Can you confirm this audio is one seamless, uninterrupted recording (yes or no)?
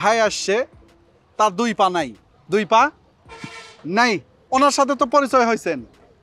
yes